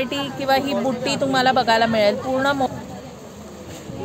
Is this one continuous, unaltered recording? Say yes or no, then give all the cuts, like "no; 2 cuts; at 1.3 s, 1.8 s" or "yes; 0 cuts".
no; 1 cut; at 2.7 s